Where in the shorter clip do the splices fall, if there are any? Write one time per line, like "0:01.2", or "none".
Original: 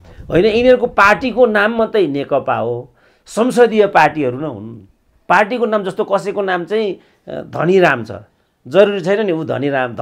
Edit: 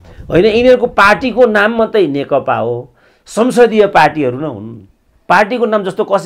none